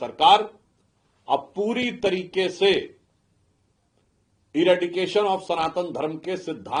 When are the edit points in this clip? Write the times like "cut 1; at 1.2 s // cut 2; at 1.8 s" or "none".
none